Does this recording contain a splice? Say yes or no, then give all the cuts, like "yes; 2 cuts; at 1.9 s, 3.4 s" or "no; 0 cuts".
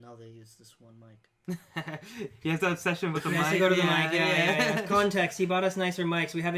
no; 0 cuts